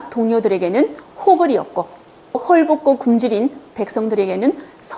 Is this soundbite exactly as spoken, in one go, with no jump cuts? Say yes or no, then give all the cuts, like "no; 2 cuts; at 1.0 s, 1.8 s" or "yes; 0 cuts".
yes; 0 cuts